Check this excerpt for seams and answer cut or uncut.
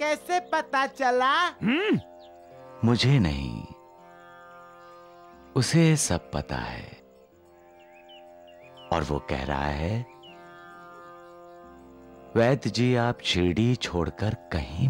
uncut